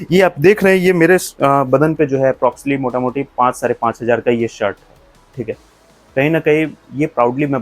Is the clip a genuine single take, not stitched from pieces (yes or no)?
yes